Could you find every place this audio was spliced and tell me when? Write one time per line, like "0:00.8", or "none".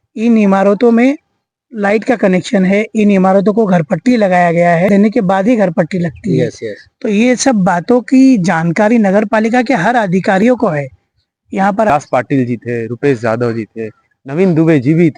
0:04.9
0:11.9